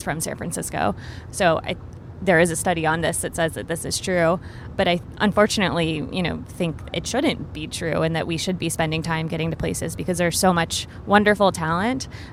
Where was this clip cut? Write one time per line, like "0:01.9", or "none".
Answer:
none